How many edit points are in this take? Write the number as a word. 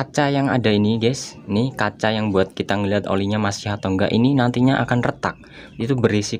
zero